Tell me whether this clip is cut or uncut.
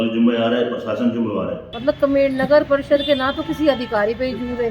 cut